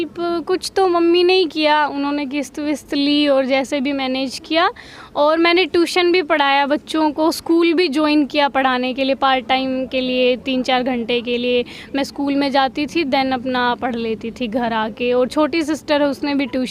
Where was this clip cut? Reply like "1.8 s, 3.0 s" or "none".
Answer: none